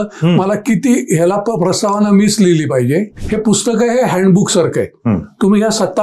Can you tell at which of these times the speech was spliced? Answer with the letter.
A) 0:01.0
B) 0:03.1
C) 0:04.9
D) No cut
B